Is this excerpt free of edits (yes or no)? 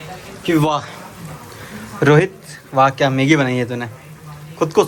yes